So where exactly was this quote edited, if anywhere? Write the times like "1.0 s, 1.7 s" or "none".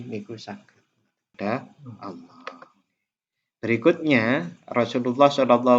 1.3 s